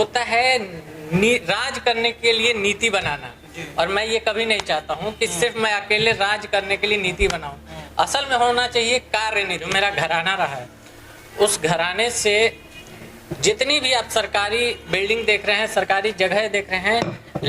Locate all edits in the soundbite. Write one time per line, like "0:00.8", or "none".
0:09.7